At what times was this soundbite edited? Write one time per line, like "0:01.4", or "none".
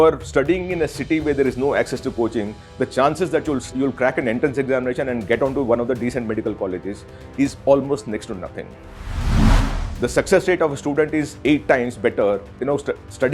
0:03.7

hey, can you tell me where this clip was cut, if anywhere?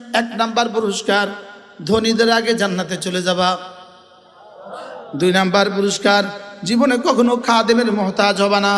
none

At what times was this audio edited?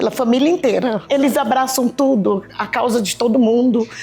0:01.0

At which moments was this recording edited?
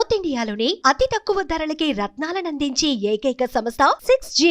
none

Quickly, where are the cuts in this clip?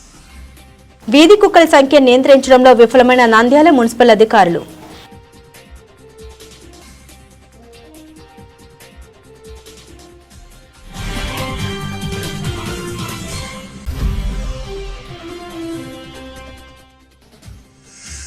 0:00.9

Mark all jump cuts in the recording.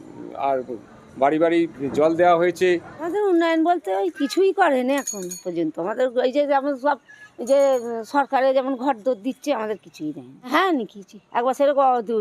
0:03.0
0:10.5

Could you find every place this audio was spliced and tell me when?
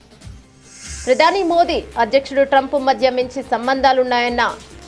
0:01.0

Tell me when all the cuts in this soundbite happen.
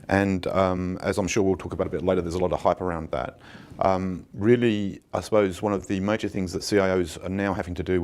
0:06.1

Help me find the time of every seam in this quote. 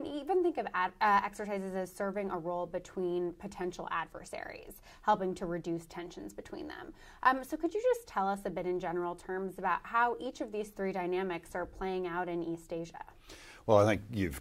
0:04.1

